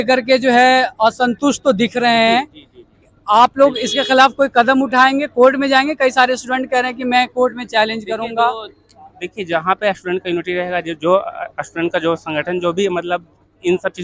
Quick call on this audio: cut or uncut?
uncut